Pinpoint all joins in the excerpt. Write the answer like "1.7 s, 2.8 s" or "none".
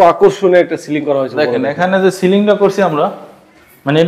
none